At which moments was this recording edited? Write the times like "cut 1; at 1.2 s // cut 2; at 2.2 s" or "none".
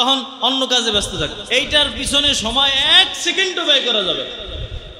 cut 1; at 1.4 s